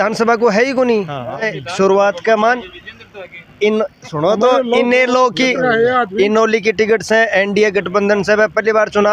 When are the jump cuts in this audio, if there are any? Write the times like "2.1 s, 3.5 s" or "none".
1.4 s

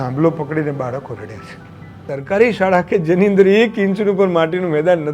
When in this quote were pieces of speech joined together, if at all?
2.0 s

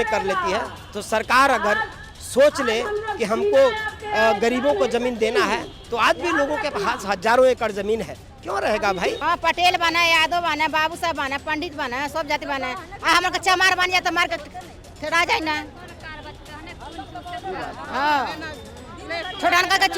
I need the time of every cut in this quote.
9.2 s

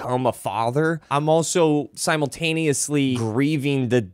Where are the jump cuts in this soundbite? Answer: 1.0 s, 1.9 s, 3.2 s

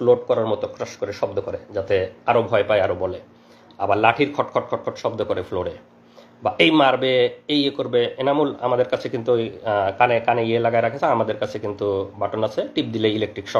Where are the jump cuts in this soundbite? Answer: none

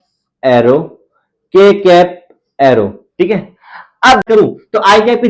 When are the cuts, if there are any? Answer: 4.2 s

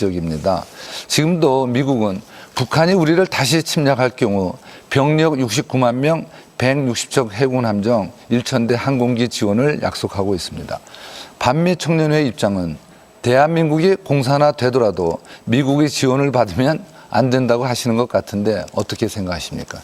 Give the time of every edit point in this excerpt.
17.9 s

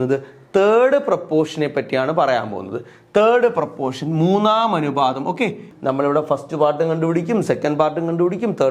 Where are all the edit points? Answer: 5.7 s

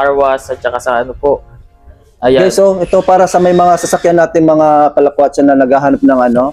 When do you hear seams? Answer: none

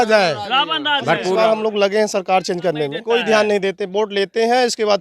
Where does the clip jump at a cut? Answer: 1.3 s, 3.0 s

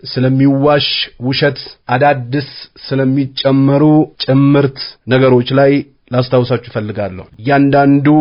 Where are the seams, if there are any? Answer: 7.3 s

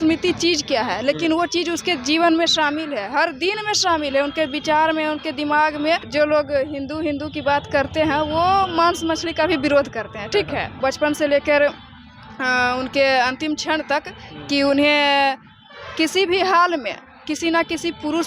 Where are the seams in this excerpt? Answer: 6.1 s, 10.7 s

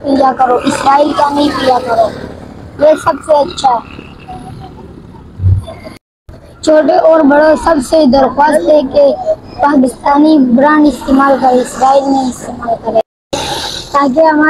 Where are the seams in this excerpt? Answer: none

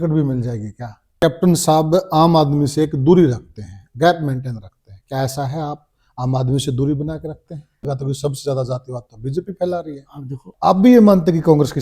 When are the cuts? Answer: 1.2 s, 7.9 s, 10.5 s

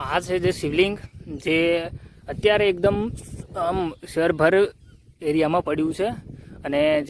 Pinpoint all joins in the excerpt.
none

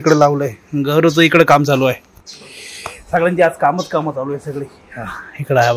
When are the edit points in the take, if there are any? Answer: none

